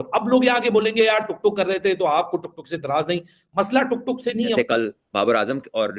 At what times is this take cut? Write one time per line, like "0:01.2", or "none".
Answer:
0:04.5